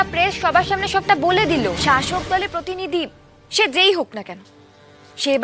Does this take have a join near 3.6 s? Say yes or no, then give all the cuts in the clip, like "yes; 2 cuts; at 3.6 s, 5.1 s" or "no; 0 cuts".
no; 1 cut; at 1.8 s